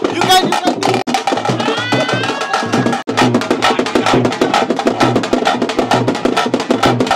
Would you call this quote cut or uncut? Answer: cut